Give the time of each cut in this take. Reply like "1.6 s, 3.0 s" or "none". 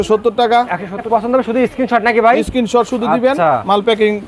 1.1 s